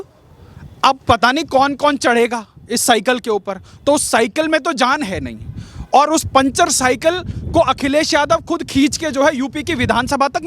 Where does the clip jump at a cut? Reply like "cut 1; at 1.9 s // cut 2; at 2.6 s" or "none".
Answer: none